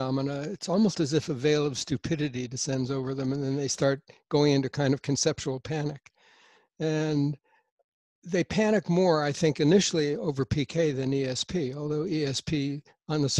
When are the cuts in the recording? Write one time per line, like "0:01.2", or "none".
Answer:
none